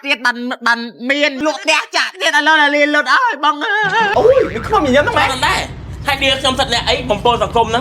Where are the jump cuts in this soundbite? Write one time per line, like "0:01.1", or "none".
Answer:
0:01.4
0:04.1

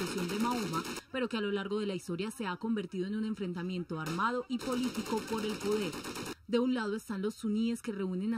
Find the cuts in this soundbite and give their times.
0:06.0

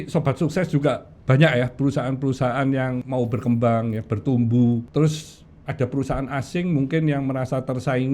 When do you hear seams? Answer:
0:03.0
0:04.9

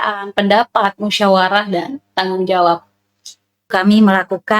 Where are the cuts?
0:03.7

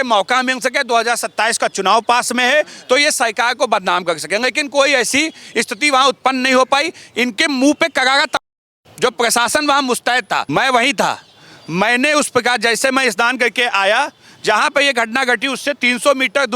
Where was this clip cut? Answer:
0:10.5

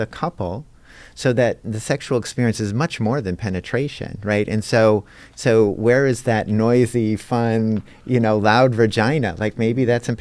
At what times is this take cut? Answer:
none

